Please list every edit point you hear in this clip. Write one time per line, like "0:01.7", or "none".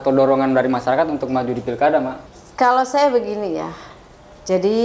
0:02.2

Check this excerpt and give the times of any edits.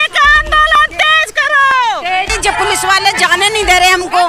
0:02.3

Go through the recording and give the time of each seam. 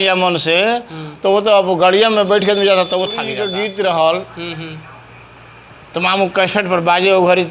0:03.4

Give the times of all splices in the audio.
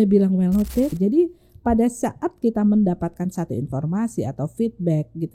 0:01.0

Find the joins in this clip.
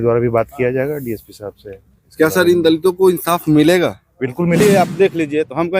0:04.6

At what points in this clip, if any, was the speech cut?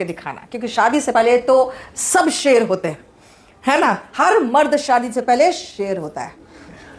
none

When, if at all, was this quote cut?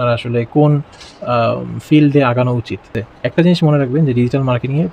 0:03.0

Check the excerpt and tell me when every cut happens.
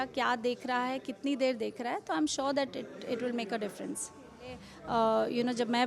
0:04.7

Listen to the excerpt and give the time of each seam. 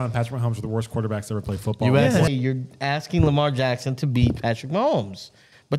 0:02.3

